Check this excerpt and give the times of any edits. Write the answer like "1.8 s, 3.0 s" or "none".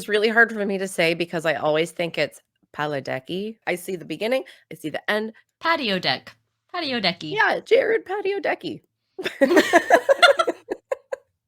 3.6 s, 7.6 s